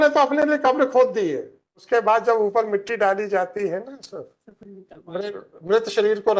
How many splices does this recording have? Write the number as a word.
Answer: one